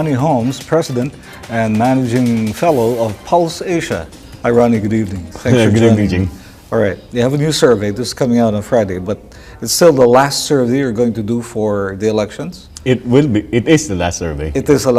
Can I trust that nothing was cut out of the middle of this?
no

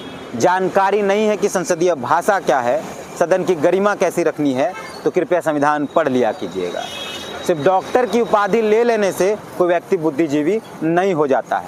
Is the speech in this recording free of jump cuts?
yes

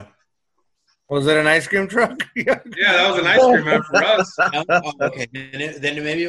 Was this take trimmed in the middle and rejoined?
no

